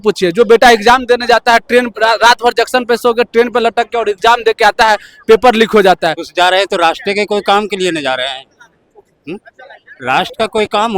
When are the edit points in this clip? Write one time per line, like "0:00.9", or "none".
0:06.2